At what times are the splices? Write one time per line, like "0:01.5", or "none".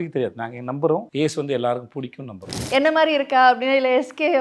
0:01.1
0:02.5